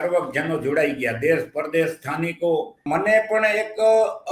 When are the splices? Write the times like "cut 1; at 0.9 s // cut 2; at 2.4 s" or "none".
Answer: cut 1; at 2.8 s